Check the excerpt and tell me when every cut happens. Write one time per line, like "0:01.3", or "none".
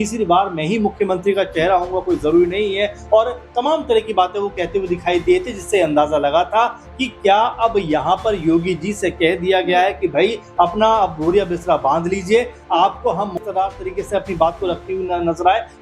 0:13.5